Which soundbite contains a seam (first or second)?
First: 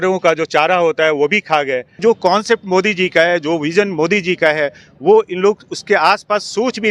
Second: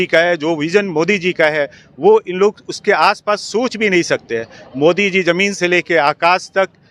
first